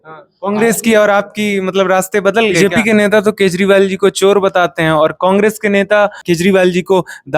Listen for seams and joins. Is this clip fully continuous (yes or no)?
no